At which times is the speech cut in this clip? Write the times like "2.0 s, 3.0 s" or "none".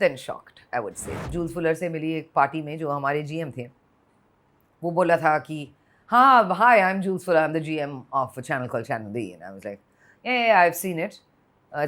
1.1 s